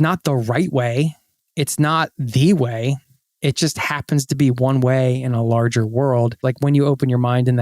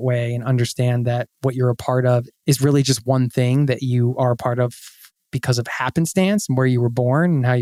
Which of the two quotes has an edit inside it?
first; 1 cut; at 6.4 s

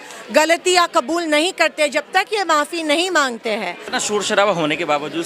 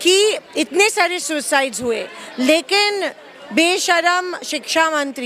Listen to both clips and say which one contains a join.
first; 1 cut; at 3.8 s

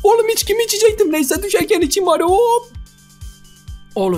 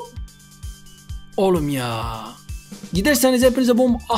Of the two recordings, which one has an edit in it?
second; 1 cut; at 2.8 s

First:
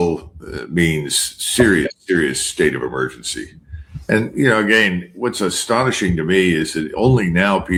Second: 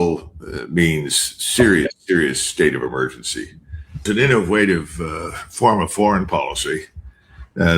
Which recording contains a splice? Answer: second; 1 cut; at 4.0 s

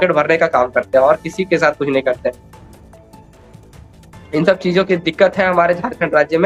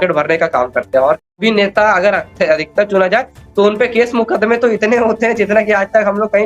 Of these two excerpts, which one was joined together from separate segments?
second; 1 cut; at 1.4 s

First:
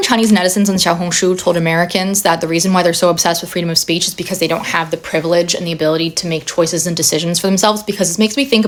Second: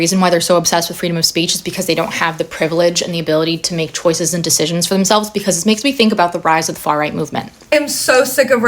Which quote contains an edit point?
second; 1 cut; at 7.5 s

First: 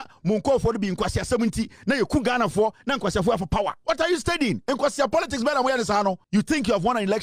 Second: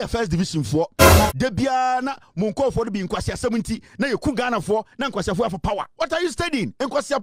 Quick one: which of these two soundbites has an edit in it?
first; 1 cut; at 6.2 s

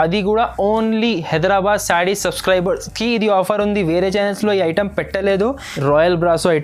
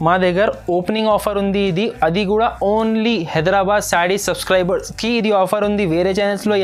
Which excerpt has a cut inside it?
first; 1 cut; at 5.7 s

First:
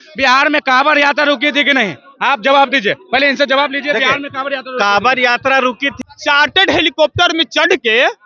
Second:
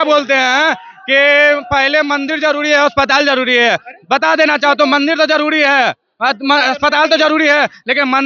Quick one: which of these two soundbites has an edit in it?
first; 1 cut; at 5.9 s

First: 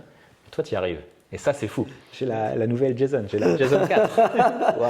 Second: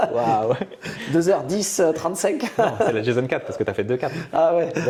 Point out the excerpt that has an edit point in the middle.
first; 1 cut; at 2.0 s

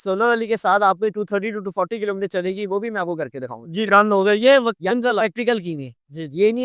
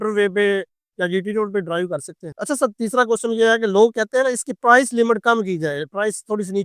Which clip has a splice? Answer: second; 1 cut; at 2.3 s

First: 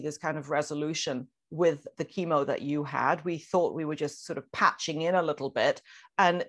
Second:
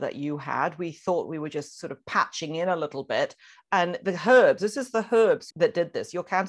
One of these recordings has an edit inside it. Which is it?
second; 1 cut; at 5.5 s

